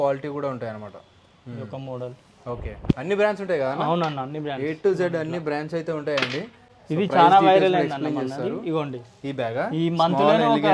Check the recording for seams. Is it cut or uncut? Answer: uncut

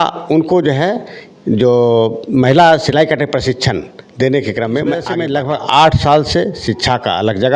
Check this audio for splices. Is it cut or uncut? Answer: cut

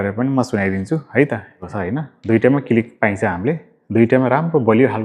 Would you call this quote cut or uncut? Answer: cut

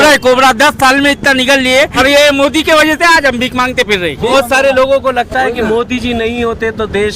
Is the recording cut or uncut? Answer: cut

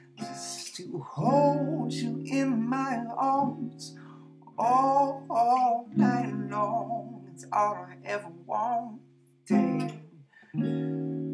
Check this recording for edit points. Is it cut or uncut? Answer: cut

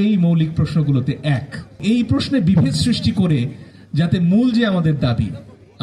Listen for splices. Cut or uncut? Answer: cut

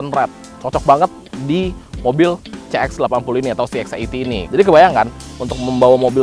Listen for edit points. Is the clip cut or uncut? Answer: cut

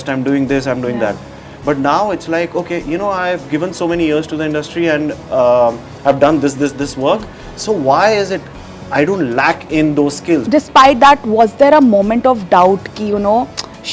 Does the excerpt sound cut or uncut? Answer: cut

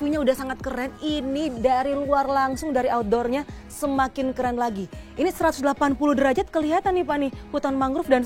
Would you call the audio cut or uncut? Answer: uncut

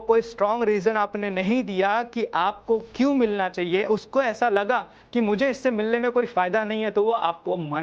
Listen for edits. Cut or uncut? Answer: uncut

